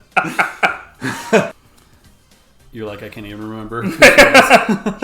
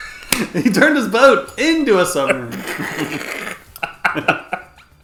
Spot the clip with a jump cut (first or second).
first